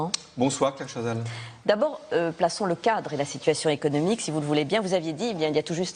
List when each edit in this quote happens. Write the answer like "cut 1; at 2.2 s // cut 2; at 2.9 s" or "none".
none